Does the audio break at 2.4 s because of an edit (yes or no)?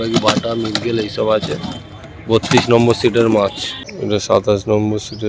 no